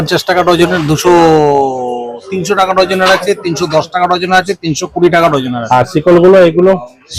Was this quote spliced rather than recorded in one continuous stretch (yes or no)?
no